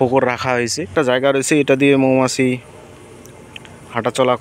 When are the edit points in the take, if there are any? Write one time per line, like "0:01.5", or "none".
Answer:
0:00.9